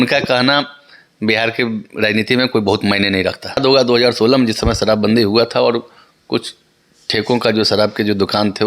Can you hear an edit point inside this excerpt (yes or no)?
yes